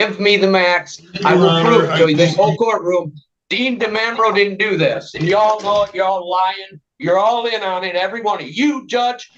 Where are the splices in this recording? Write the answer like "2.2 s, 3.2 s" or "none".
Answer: none